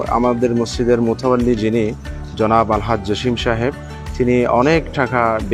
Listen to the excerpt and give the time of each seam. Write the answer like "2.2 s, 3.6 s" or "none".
none

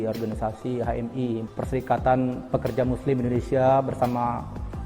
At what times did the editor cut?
1.5 s

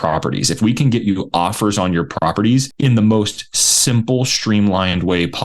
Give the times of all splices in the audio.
2.7 s

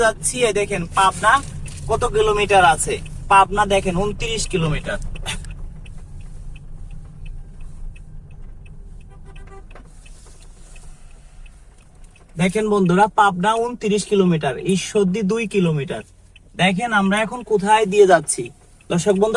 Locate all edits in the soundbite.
none

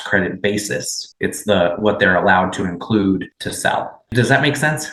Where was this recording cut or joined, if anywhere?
none

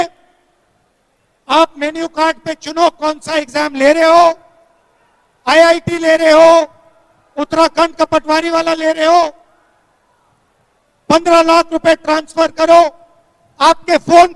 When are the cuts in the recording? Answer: none

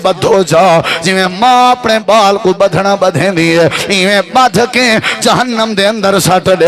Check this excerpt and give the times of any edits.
none

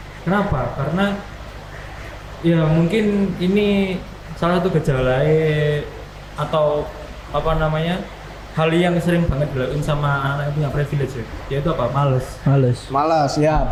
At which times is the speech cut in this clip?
none

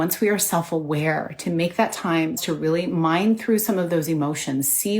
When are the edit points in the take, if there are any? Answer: 2.4 s

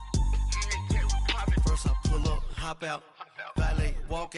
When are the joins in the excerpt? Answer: 1.2 s

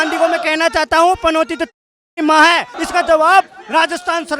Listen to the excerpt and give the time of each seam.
2.8 s

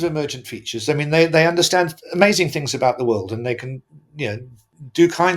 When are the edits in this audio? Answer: none

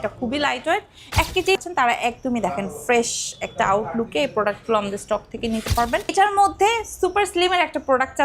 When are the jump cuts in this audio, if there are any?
1.6 s, 6.1 s

